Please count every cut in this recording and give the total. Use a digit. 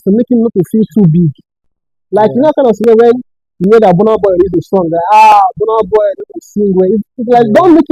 0